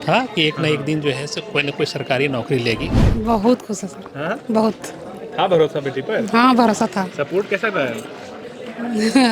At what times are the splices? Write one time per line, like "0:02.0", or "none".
0:03.0